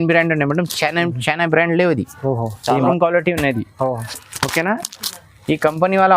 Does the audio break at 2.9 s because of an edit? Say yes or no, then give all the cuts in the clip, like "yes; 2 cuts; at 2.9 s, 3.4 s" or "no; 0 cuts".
yes; 1 cut; at 2.9 s